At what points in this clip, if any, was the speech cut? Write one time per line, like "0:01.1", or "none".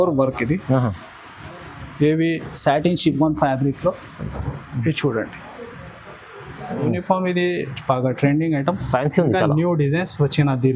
0:06.8